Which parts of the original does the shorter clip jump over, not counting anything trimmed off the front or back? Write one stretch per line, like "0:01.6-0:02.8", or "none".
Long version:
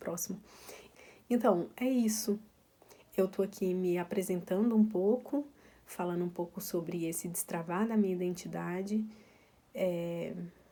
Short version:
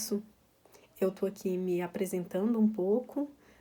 none